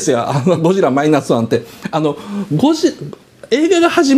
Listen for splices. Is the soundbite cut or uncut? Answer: uncut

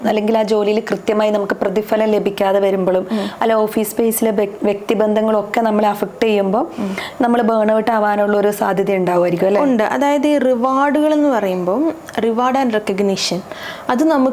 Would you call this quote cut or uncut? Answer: uncut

